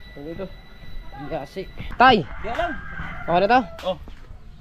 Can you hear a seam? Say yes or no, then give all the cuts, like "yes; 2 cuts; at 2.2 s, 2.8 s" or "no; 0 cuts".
yes; 1 cut; at 1.9 s